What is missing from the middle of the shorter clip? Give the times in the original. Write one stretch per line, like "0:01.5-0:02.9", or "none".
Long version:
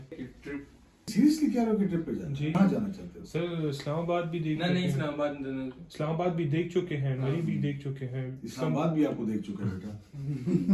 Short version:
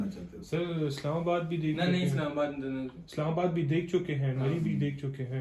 none